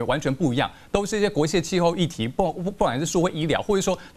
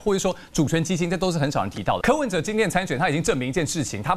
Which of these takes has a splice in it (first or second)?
second